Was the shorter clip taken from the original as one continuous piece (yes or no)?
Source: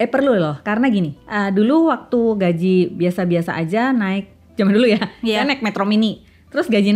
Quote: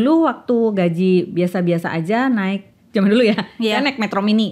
yes